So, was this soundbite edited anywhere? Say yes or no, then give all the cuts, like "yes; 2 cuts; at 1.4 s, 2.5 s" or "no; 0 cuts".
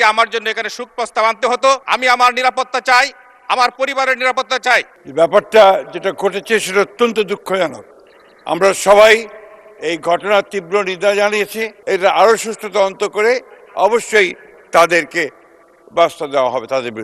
yes; 3 cuts; at 1.8 s, 5.0 s, 11.7 s